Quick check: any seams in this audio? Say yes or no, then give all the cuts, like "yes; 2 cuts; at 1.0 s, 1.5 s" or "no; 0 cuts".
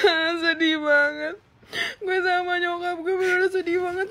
no; 0 cuts